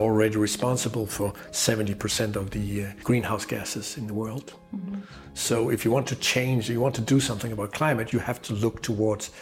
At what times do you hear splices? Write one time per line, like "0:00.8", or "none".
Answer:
none